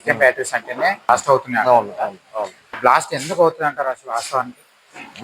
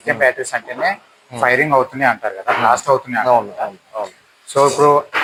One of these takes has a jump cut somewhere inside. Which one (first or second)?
first